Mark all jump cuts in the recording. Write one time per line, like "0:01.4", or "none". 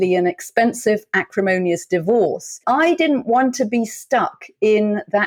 0:02.6